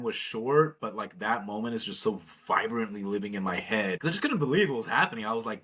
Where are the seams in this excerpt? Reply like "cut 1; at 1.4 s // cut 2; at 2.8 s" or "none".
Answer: cut 1; at 4.0 s